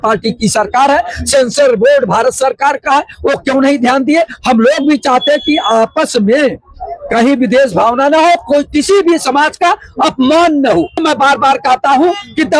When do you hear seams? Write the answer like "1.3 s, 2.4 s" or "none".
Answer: none